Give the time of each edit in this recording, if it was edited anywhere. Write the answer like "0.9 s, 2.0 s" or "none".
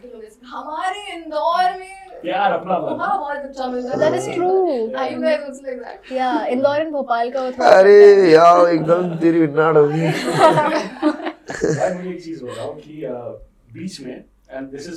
none